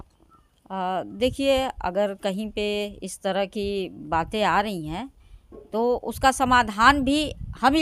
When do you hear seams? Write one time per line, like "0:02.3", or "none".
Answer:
none